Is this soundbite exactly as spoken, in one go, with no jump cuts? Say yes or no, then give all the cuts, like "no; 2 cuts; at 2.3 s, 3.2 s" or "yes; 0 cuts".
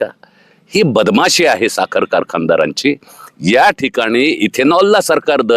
yes; 0 cuts